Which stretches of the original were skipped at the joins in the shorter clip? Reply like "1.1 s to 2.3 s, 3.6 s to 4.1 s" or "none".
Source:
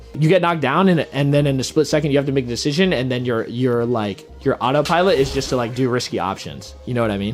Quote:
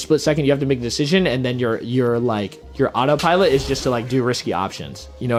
none